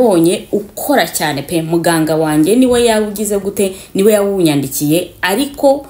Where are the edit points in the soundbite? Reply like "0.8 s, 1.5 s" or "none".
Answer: none